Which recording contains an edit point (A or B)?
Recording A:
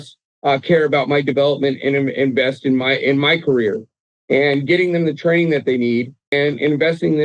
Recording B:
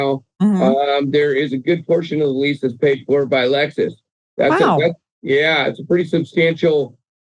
A